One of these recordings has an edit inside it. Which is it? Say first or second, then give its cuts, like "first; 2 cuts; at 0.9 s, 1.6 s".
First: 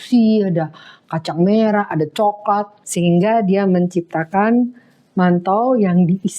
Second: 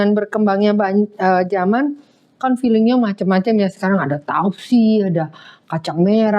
first; 1 cut; at 2.8 s